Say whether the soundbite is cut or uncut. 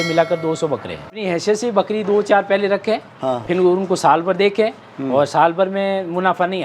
cut